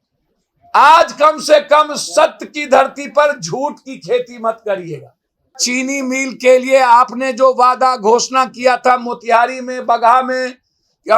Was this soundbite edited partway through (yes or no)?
yes